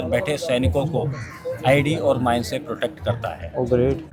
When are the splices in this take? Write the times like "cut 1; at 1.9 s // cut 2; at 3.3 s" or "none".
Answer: none